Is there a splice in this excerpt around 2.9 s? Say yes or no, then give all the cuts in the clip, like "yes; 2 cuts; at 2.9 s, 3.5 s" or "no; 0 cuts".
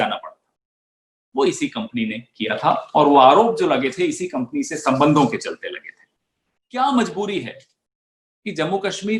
no; 1 cut; at 6.6 s